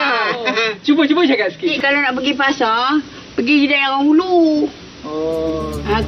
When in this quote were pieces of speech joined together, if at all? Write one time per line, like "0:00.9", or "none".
0:01.8